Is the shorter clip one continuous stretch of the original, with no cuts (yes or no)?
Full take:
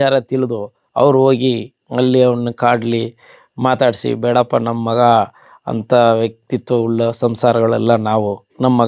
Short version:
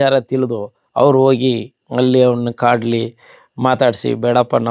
yes